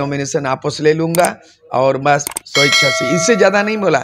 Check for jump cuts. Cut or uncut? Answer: uncut